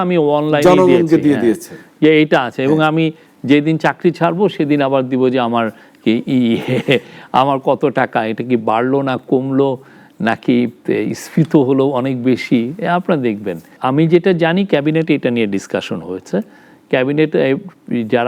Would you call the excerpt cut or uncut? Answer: uncut